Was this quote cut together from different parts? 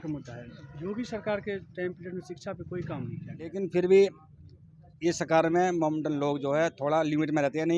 yes; 1 cut; at 3.5 s

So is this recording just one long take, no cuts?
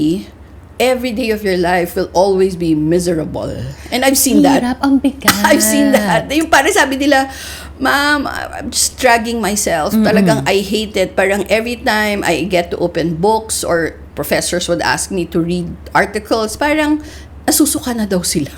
yes; 0 cuts

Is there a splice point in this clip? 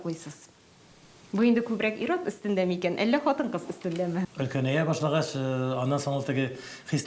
yes; 1 cut; at 4.3 s

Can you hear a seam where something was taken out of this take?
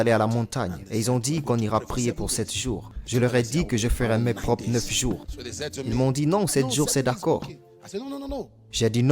yes; 2 cuts; at 2.9 s, 5.4 s

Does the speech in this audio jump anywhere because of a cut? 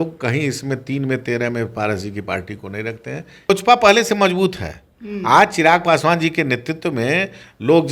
yes; 1 cut; at 3.5 s

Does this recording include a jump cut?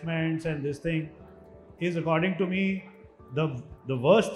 no; 0 cuts

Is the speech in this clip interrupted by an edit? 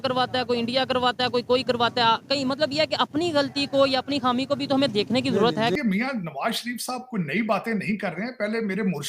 yes; 1 cut; at 5.8 s

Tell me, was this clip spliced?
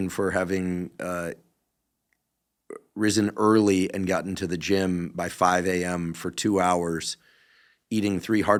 no; 0 cuts

